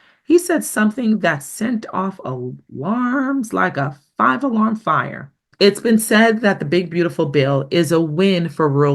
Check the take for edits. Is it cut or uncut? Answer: cut